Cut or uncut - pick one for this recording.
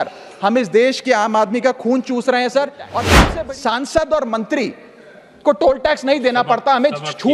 cut